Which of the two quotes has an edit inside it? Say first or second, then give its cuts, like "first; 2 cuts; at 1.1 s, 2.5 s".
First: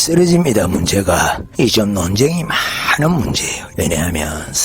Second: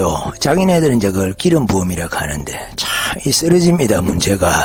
first; 1 cut; at 3.6 s